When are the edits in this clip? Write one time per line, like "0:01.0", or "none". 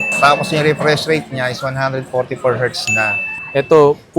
0:03.2